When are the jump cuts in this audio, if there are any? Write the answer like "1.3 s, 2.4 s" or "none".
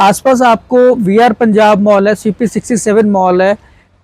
none